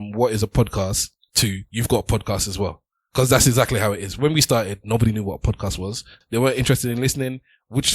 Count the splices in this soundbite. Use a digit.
1